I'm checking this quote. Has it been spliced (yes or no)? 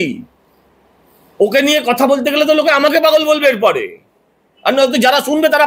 no